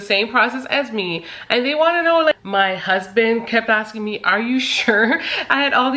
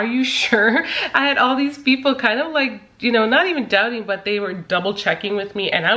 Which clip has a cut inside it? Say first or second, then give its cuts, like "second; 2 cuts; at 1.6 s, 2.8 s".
first; 1 cut; at 2.4 s